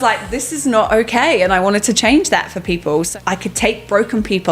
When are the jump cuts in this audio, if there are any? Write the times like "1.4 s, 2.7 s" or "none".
3.1 s